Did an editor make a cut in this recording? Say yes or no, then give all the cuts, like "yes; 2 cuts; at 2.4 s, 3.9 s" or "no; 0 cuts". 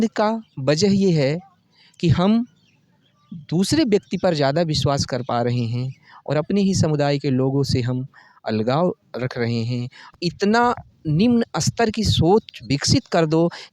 yes; 1 cut; at 10.1 s